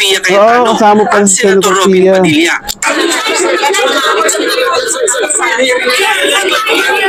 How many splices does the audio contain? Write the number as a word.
zero